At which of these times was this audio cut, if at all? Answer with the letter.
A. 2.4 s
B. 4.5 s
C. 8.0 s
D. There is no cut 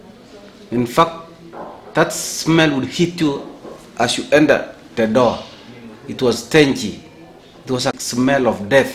C